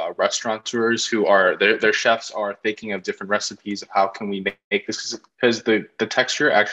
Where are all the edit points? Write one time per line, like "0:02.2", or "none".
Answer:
none